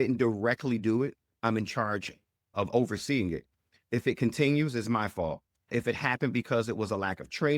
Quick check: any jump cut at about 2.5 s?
yes; 1 cut; at 2.5 s

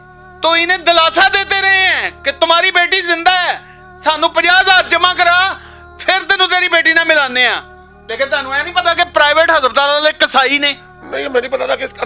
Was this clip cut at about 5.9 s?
no; 1 cut; at 8.0 s

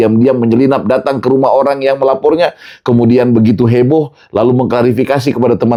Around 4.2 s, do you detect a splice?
no; 0 cuts

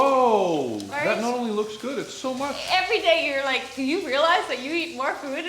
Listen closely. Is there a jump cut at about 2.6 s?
yes; 1 cut; at 2.6 s

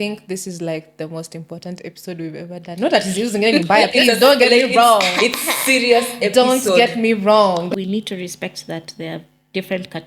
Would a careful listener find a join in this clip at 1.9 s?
no; 1 cut; at 7.7 s

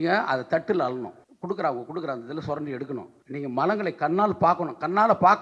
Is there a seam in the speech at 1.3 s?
yes; 2 cuts; at 1.3 s, 3.2 s

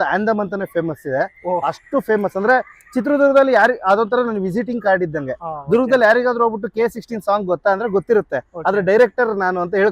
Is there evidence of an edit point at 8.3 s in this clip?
no; 0 cuts

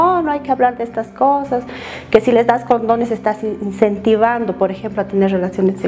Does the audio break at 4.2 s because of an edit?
no; 0 cuts

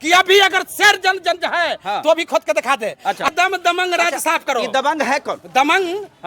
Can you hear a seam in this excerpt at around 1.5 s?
no; 1 cut; at 3.3 s

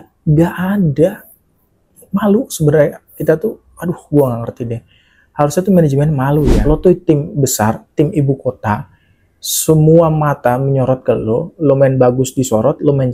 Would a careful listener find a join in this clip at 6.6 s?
yes; 1 cut; at 6.6 s

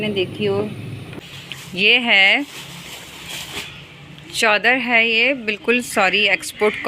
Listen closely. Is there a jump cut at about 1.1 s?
yes; 1 cut; at 1.1 s

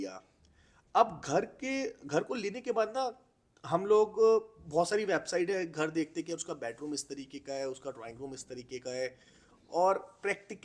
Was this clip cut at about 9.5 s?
no; 0 cuts

